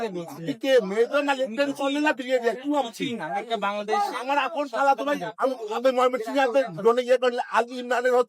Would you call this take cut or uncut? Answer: uncut